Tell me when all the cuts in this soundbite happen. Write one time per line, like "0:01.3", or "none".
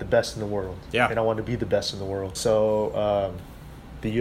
0:02.3